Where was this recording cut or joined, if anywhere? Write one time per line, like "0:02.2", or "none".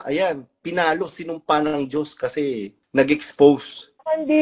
0:02.7